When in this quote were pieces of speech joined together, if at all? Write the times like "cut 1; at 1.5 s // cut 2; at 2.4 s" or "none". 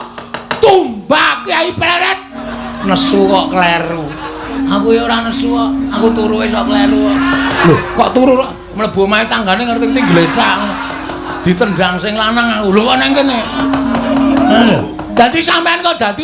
cut 1; at 2.4 s // cut 2; at 4.5 s // cut 3; at 6.0 s // cut 4; at 7.6 s // cut 5; at 13.6 s